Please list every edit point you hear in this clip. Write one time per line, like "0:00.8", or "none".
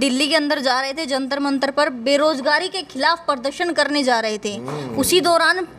none